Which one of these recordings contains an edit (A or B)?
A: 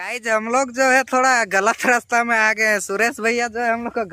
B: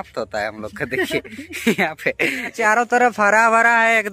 B